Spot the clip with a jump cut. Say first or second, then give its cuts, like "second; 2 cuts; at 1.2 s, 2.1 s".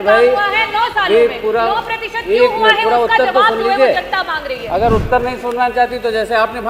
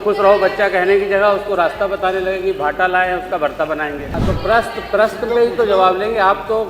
second; 1 cut; at 4.1 s